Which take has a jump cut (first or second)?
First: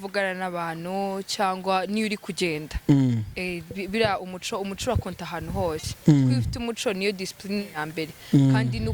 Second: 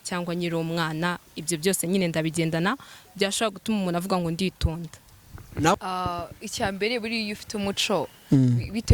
second